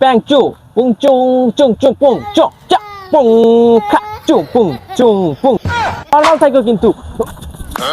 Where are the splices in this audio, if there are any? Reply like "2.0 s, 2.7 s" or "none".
6.0 s